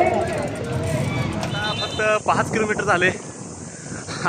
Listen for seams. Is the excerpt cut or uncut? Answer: cut